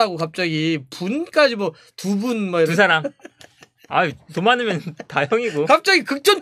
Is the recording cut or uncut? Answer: uncut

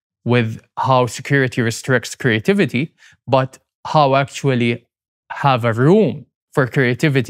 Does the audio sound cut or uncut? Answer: uncut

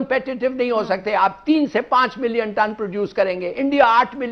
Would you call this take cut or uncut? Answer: uncut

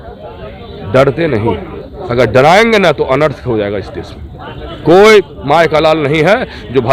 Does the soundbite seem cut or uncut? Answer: uncut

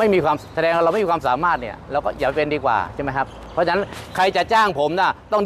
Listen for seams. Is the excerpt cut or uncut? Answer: uncut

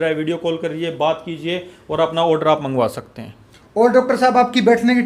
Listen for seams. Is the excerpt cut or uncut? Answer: uncut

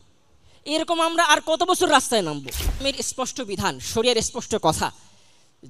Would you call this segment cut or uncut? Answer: cut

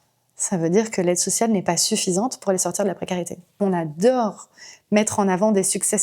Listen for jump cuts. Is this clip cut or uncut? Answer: cut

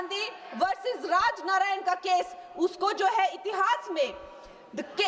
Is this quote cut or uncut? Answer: uncut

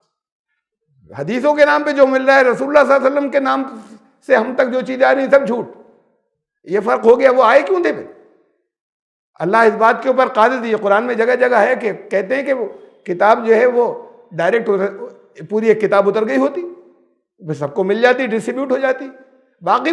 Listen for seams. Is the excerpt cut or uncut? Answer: uncut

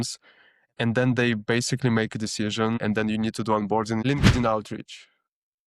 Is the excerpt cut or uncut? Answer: cut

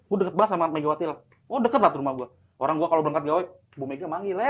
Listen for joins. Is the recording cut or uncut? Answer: uncut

